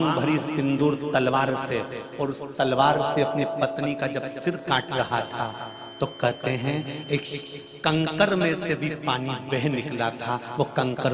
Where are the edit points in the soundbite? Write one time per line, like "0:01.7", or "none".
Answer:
none